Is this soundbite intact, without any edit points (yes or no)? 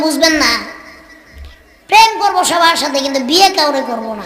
yes